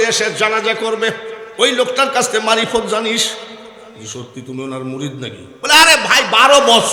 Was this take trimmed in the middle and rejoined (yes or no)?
no